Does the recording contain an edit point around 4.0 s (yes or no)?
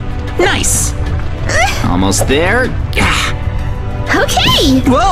no